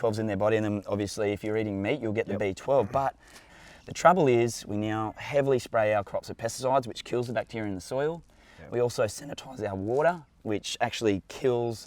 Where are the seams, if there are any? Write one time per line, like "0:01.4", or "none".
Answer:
0:03.5